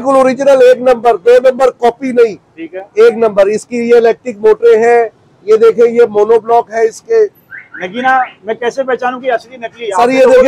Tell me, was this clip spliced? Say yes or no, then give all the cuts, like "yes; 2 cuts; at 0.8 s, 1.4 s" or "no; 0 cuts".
no; 0 cuts